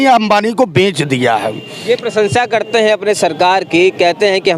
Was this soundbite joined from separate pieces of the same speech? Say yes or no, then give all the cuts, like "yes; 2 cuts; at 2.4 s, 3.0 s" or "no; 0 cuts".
no; 0 cuts